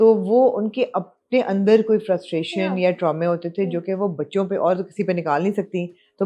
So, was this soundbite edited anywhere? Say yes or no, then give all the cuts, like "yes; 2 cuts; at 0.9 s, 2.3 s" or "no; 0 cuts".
no; 0 cuts